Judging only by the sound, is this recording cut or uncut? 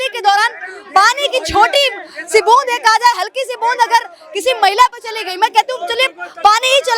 uncut